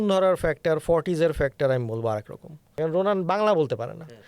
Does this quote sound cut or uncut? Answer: cut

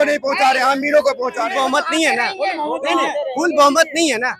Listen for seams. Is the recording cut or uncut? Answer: cut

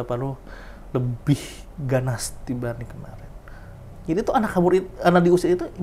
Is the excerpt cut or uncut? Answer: uncut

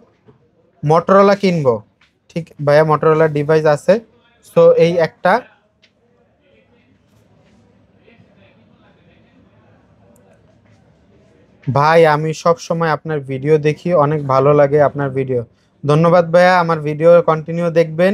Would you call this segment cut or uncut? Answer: uncut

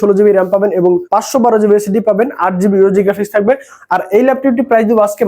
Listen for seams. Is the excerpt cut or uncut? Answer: cut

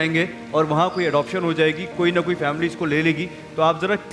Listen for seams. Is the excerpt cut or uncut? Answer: uncut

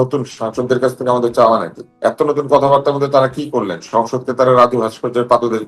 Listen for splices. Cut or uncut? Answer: cut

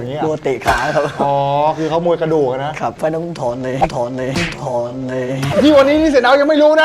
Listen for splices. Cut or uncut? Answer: cut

